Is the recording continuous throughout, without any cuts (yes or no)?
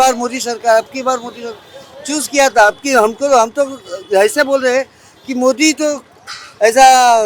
yes